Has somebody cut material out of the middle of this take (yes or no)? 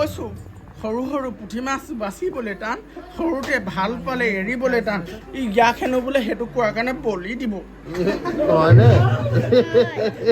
yes